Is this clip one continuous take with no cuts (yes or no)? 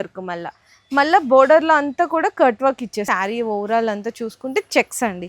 no